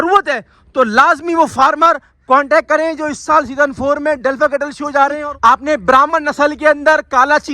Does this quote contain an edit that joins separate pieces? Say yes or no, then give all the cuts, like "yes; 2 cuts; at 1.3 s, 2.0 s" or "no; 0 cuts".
yes; 1 cut; at 5.2 s